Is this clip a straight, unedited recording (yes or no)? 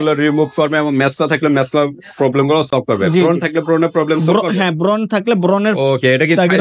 yes